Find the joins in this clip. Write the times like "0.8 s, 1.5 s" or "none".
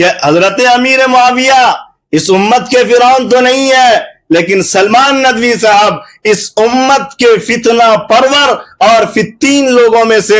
none